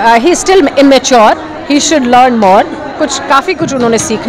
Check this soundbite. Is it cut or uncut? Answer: uncut